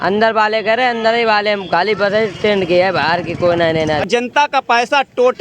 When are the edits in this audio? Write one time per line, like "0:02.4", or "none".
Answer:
0:04.1